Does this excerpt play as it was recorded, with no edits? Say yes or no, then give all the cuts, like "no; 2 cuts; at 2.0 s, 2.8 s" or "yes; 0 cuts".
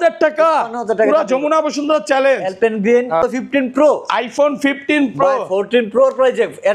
no; 1 cut; at 3.2 s